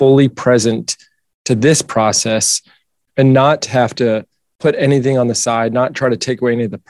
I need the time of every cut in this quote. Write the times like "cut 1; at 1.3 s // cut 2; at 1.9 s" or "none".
none